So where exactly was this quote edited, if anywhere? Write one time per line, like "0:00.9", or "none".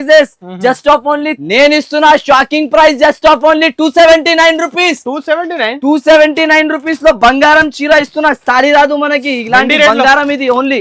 0:01.3